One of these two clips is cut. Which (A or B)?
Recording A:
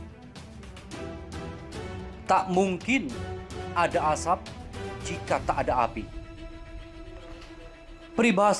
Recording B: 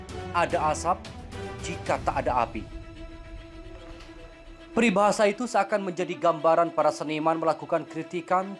A